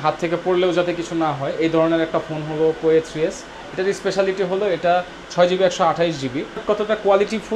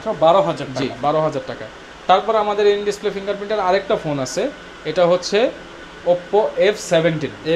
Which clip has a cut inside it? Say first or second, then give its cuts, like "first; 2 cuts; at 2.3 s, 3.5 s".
first; 1 cut; at 6.6 s